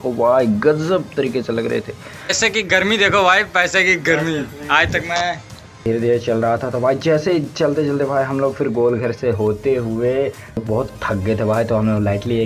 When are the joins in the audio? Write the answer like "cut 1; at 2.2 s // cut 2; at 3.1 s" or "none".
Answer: cut 1; at 2.3 s // cut 2; at 5.9 s // cut 3; at 10.6 s